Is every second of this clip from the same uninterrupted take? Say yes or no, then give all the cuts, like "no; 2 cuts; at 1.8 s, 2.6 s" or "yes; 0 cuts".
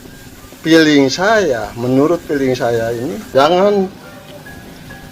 no; 1 cut; at 3.2 s